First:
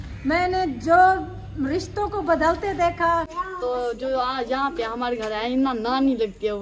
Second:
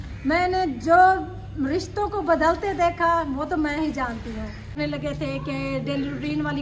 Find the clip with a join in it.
first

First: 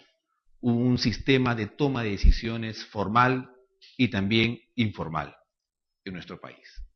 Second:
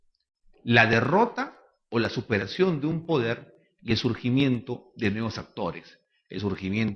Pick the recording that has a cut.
second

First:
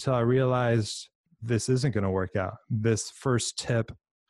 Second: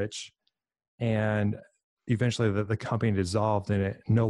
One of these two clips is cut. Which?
first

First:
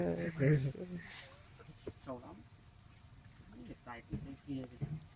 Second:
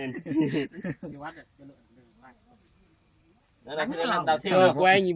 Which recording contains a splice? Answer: first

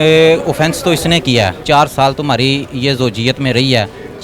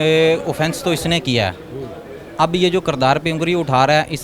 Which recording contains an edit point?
first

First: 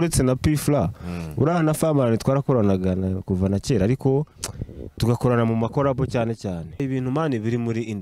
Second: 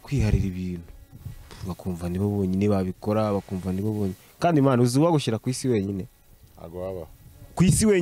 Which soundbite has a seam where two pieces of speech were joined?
first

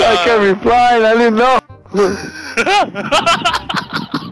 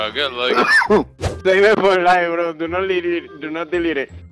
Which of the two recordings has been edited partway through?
second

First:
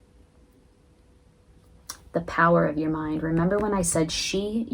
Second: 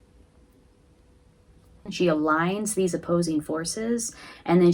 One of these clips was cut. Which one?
second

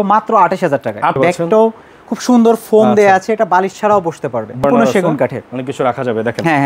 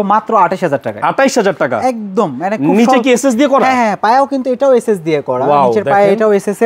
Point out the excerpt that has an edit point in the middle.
first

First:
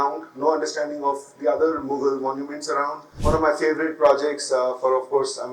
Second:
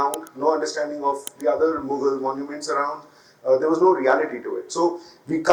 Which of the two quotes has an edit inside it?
first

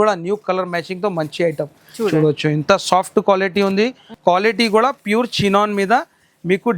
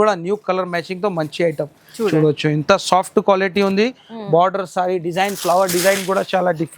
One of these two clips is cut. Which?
first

